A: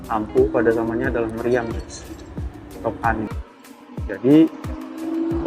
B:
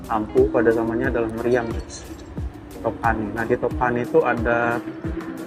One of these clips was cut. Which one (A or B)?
A